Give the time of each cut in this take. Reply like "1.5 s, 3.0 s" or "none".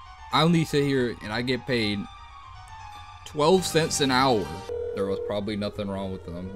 4.7 s